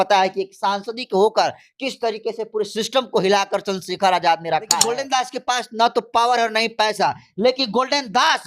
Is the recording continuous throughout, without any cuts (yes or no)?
no